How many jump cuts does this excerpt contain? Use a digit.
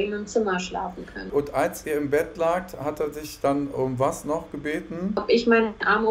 2